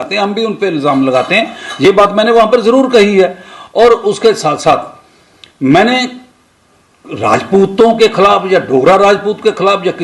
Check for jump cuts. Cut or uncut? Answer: uncut